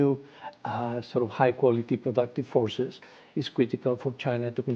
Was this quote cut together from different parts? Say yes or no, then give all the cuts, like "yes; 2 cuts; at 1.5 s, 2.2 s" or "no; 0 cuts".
no; 0 cuts